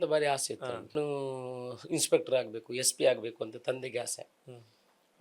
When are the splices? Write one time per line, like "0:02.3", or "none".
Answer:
0:00.9